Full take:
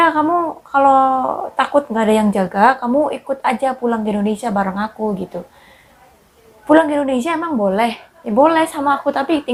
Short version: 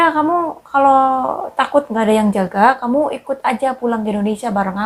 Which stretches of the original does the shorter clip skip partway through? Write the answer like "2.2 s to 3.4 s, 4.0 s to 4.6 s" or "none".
none

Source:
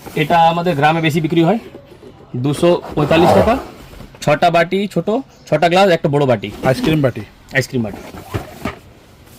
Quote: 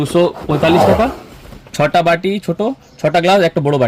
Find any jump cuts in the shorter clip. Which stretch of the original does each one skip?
none

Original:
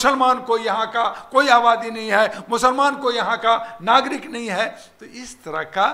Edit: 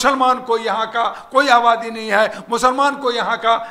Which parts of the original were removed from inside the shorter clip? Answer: none

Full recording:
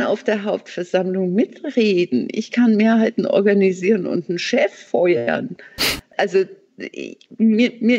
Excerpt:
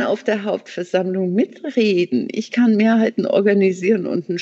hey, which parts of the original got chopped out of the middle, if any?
none

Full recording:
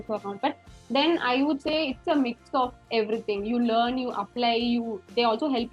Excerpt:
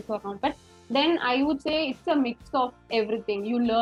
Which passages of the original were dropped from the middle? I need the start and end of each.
none

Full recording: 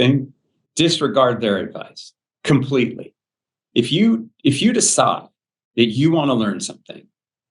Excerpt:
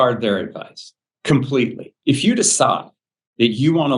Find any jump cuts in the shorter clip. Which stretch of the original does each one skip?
3.1 s to 4.3 s

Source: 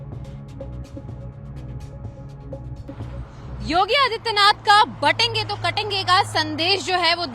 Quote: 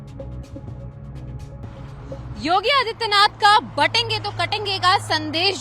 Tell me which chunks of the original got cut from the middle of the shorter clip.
2.7 s to 3.6 s

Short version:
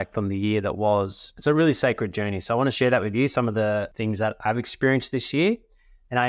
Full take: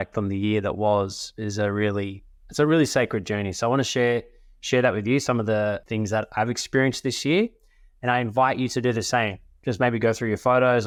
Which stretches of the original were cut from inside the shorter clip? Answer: 1.2 s to 2.4 s, 3.9 s to 4.7 s

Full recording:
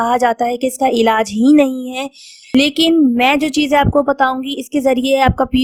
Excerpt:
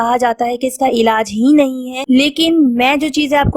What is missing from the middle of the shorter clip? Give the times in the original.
1.9 s to 2.3 s

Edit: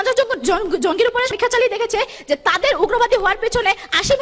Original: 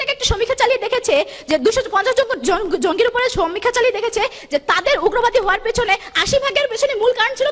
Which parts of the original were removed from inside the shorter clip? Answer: 3.3 s to 3.5 s

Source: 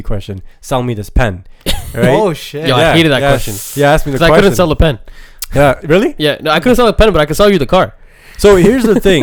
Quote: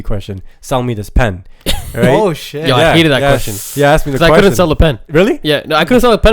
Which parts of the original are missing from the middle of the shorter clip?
5.1 s to 5.8 s

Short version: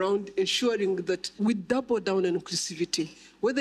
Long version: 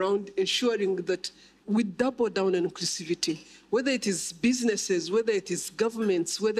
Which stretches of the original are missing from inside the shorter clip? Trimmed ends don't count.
1.3 s to 1.6 s

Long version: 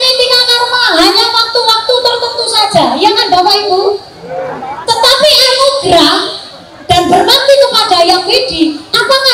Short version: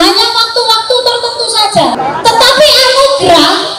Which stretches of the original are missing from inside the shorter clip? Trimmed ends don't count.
2.9 s to 4.6 s

